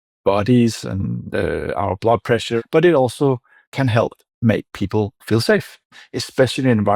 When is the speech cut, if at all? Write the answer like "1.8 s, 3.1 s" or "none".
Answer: 2.5 s, 5.9 s